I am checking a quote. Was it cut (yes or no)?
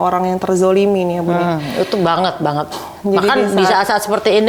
no